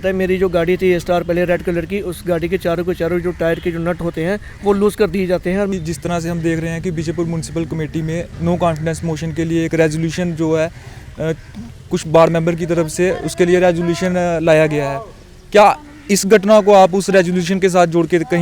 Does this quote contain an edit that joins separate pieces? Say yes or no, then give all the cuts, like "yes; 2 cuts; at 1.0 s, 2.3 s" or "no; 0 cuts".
yes; 1 cut; at 5.7 s